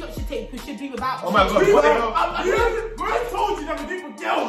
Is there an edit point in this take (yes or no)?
no